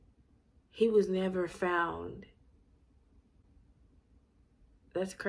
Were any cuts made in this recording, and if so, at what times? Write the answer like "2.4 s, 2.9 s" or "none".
none